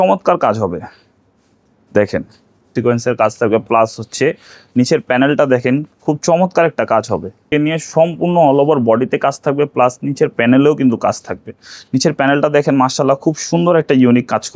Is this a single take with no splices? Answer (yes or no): no